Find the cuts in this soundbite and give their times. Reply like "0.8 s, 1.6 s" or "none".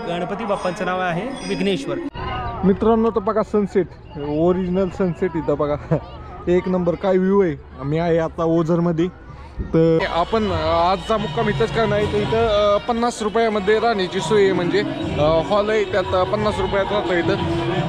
2.1 s, 10.0 s